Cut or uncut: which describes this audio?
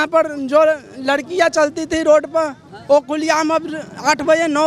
uncut